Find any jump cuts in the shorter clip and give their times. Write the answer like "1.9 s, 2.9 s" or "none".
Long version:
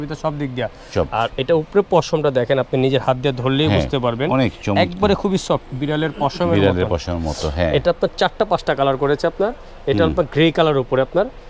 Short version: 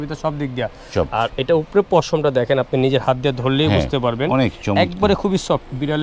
none